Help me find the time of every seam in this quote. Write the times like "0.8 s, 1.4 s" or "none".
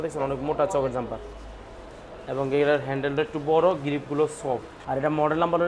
4.7 s